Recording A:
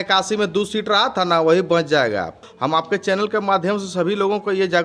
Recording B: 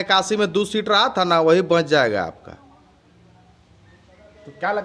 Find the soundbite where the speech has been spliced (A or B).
A